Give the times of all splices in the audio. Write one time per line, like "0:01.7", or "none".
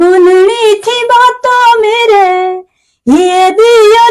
none